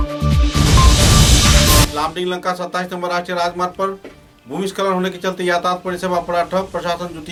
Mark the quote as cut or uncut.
uncut